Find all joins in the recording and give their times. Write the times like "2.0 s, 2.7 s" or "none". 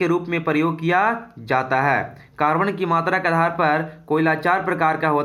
none